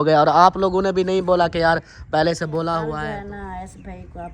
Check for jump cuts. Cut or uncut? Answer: cut